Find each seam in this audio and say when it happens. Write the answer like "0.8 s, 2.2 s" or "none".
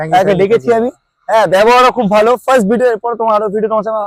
none